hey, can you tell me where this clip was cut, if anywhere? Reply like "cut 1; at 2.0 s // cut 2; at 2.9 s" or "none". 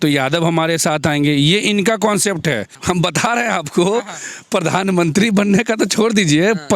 cut 1; at 2.7 s